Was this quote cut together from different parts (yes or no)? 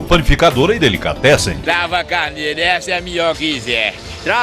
yes